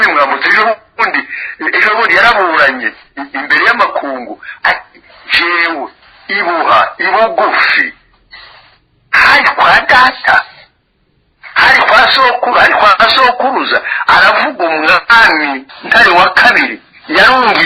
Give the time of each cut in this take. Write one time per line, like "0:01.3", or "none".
0:15.7